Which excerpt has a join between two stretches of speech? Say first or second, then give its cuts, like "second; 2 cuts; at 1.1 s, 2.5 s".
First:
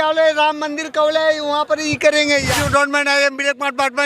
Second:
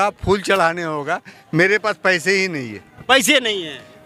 first; 1 cut; at 2.5 s